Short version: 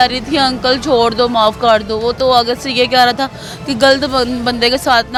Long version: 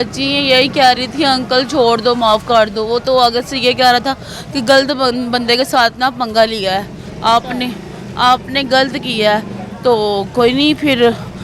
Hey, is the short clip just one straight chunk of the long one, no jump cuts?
yes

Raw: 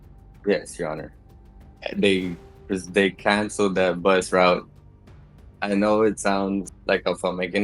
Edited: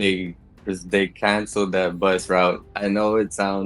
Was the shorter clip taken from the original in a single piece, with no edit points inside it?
no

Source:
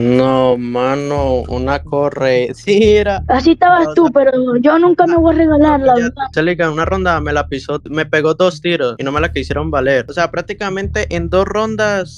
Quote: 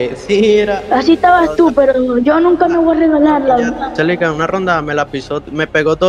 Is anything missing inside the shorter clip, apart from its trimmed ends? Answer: no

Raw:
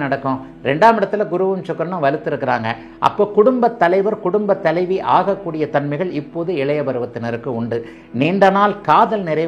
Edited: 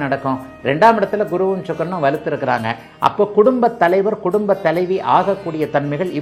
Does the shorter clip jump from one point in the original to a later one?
no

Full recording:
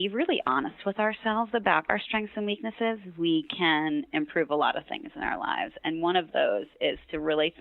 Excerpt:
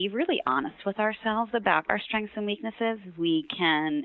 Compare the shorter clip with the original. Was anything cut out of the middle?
no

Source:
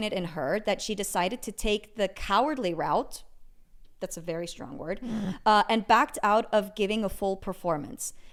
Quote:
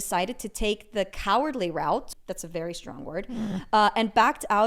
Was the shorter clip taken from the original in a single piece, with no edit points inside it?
no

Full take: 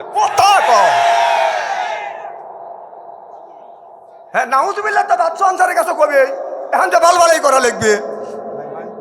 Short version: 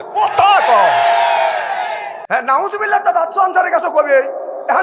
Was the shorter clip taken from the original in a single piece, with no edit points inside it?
no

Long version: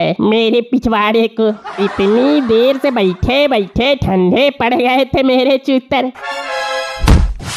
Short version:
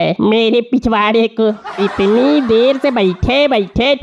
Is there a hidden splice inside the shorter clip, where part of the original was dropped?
no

